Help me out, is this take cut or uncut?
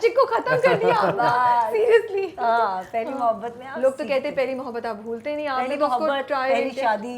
uncut